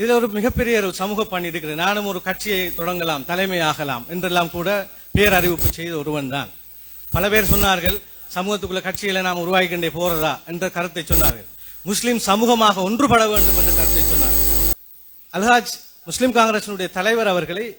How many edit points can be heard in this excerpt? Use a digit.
1